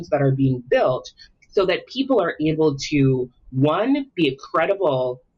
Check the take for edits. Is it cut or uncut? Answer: uncut